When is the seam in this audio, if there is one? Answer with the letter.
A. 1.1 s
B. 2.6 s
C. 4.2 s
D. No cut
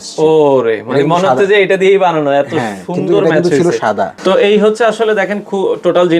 C